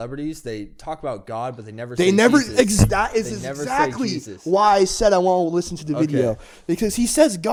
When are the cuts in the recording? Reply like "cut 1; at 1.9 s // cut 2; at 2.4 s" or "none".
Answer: none